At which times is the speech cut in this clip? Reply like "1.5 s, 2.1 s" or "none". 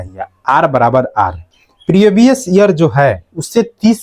1.4 s